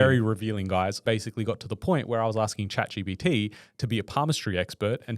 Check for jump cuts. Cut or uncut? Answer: cut